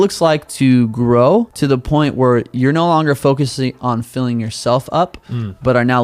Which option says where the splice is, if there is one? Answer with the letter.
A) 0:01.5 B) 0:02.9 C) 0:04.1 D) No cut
A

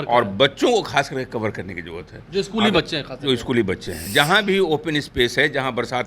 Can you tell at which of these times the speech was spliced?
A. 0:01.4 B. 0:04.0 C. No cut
B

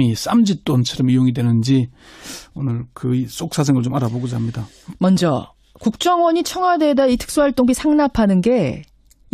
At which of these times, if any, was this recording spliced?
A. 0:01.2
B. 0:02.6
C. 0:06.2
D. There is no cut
D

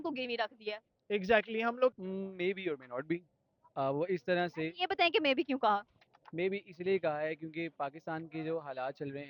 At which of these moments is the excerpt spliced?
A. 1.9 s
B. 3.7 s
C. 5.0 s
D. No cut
A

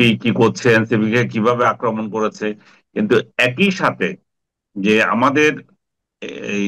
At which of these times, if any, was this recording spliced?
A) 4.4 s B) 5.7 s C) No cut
C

